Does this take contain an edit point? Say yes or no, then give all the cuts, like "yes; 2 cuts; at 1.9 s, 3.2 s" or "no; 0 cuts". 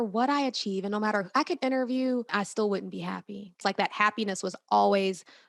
yes; 2 cuts; at 2.3 s, 3.6 s